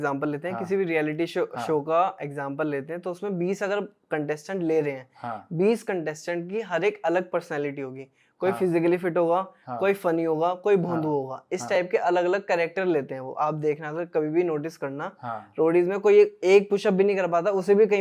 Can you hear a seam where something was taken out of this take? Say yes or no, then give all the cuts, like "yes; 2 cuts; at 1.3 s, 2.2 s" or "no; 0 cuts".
no; 0 cuts